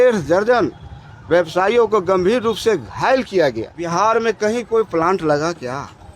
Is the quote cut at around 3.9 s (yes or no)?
yes